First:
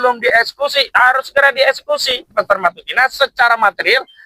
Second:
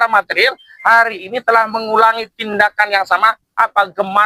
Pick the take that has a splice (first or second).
first